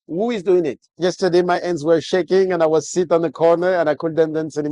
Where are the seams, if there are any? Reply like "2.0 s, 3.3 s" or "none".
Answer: 0.9 s